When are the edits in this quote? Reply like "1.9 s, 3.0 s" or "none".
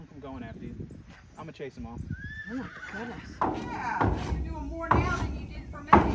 3.2 s

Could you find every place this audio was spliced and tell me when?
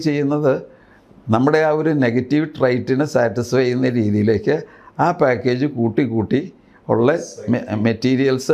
none

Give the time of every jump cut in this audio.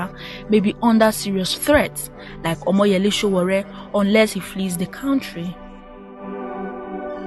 6.3 s

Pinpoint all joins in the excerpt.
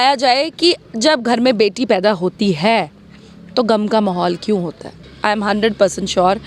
5.1 s

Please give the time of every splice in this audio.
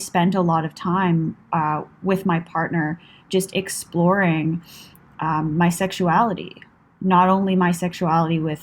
none

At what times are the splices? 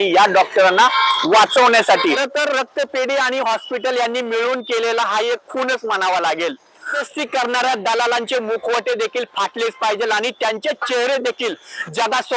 2.0 s, 7.0 s

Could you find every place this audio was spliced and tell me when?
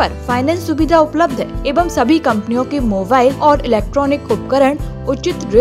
1.6 s, 3.4 s

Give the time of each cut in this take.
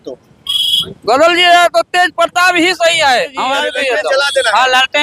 3.6 s

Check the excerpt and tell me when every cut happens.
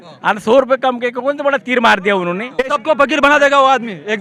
2.8 s

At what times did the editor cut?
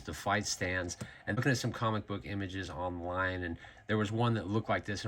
1.4 s

